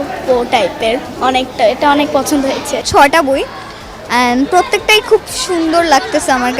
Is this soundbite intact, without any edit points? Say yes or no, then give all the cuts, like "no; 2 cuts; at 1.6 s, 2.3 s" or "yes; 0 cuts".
no; 1 cut; at 2.8 s